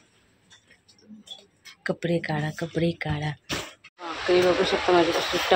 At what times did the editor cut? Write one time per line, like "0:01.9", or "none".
0:04.0